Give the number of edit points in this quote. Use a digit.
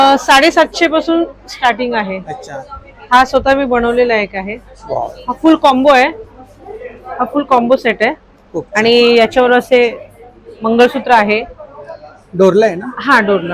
0